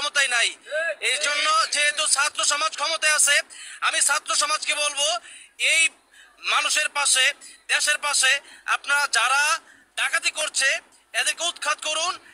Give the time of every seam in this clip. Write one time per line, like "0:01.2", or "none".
none